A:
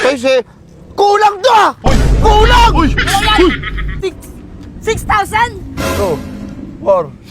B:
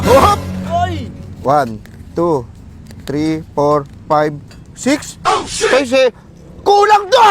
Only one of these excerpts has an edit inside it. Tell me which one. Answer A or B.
A